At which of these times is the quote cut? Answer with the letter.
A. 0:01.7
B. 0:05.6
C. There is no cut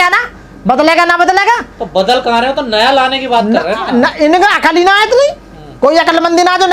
C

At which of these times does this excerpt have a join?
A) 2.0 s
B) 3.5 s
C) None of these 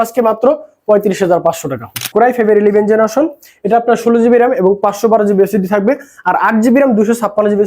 A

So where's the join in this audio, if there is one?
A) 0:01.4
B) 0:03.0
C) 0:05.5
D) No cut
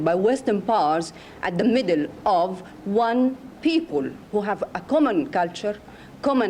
D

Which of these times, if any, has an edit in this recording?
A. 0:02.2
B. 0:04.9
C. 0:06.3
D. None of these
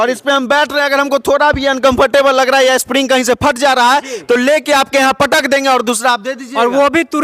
D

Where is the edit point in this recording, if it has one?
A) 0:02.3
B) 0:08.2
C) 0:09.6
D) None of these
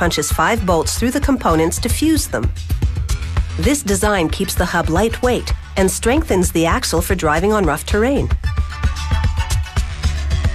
A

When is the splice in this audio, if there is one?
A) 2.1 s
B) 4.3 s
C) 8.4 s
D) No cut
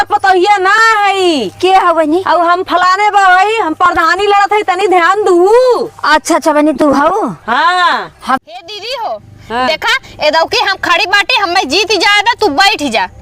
C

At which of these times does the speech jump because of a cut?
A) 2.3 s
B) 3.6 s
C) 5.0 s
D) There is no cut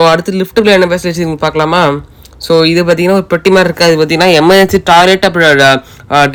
D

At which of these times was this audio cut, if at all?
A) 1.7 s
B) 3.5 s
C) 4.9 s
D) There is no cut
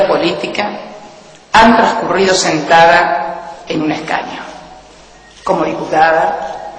B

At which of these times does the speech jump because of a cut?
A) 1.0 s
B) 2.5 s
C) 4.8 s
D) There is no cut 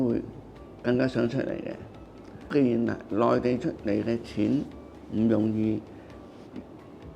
B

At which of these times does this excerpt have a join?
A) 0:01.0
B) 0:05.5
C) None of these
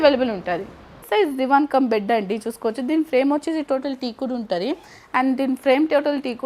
A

